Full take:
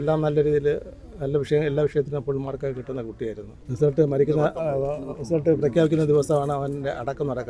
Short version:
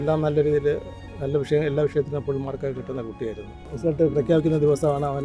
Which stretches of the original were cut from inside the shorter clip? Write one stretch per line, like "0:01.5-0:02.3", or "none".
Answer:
0:03.6-0:05.1